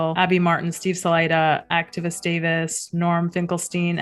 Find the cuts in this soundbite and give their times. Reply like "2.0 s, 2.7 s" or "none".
none